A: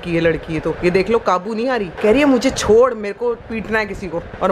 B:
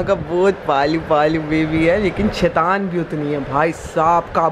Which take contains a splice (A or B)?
A